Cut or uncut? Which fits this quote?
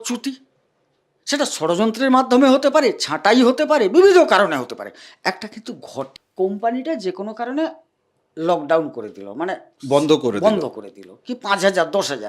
cut